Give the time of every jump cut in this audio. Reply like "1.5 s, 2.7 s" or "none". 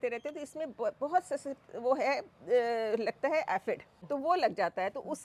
none

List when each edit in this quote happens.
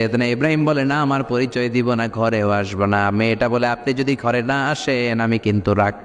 none

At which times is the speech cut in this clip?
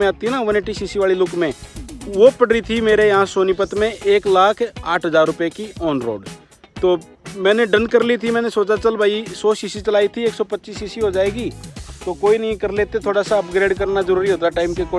6.4 s

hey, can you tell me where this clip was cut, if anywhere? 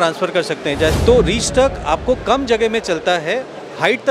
1.0 s

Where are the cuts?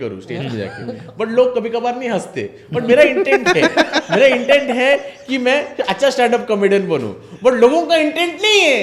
none

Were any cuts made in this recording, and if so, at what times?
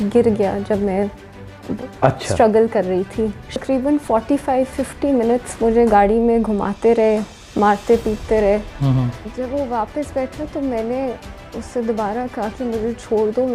3.6 s, 9.1 s

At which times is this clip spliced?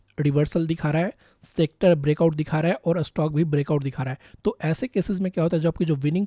none

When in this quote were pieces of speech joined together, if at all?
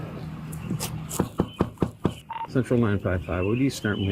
3.2 s

